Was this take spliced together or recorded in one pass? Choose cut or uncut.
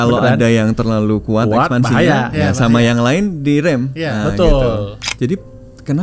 cut